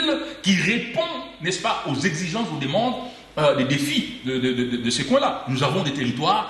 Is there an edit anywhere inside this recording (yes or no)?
no